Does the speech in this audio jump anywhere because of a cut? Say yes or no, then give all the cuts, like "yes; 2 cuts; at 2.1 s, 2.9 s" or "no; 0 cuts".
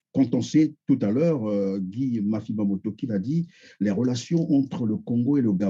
no; 0 cuts